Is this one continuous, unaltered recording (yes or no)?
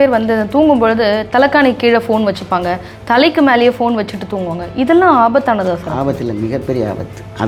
yes